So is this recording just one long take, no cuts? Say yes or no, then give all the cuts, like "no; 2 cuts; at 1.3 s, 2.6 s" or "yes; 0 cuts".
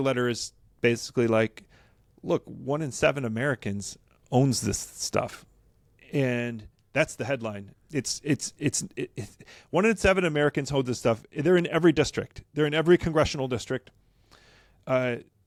yes; 0 cuts